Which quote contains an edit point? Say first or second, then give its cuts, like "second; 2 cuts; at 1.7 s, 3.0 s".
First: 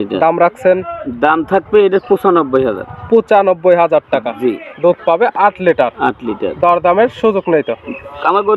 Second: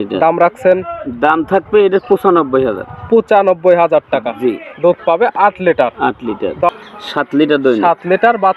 second; 1 cut; at 6.7 s